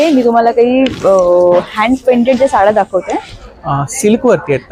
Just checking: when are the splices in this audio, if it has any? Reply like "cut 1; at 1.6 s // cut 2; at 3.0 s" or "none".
none